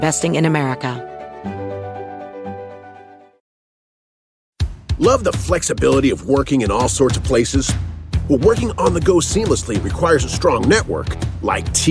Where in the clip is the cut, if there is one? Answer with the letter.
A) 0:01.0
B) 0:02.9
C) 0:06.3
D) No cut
A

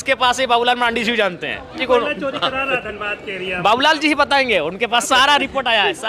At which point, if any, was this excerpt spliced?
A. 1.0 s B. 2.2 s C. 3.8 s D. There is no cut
D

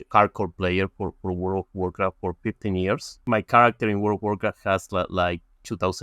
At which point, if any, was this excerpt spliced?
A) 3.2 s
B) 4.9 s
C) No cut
A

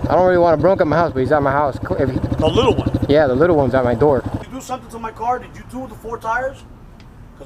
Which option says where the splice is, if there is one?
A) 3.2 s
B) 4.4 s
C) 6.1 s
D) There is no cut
B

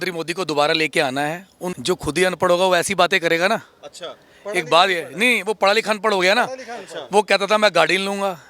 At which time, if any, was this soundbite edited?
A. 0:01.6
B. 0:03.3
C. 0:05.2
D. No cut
A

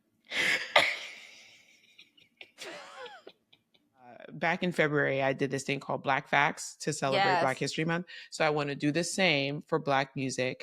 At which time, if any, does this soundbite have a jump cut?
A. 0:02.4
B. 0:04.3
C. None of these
B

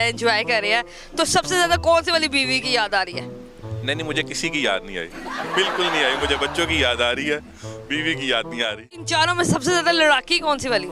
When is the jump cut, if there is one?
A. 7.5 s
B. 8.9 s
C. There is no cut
B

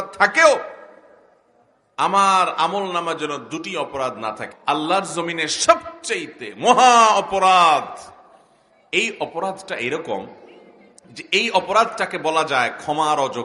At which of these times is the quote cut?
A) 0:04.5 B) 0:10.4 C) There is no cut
A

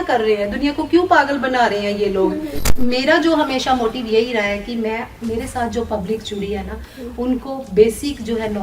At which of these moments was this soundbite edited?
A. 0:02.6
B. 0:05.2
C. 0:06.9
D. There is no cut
A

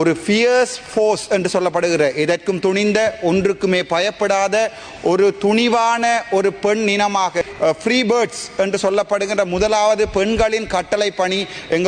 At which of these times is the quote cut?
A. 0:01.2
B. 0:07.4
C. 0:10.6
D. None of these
B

